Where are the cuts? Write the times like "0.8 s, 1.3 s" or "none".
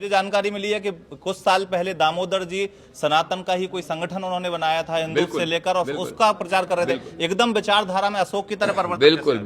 none